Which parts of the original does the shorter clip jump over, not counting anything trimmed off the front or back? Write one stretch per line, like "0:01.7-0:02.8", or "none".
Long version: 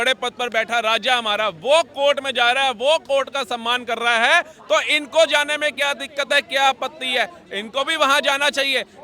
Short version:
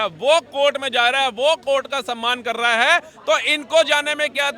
none